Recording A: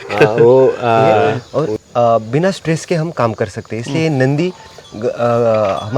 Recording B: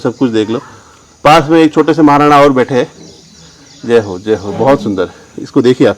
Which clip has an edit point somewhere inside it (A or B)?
A